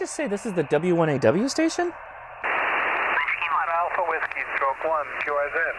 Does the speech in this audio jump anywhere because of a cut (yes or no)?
yes